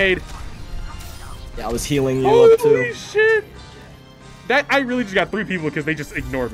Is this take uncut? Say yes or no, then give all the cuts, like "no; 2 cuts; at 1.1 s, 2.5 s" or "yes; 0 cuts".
yes; 0 cuts